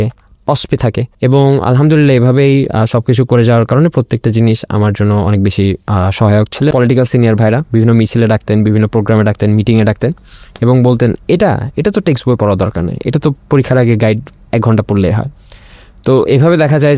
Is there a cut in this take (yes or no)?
yes